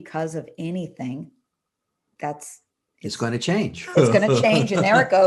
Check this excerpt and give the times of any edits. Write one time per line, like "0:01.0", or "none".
none